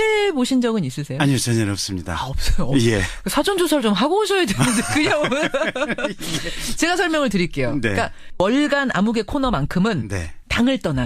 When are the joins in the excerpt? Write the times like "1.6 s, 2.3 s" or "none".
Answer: 10.0 s